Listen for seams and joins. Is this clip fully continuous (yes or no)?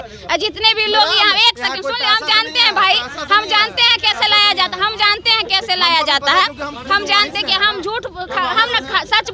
yes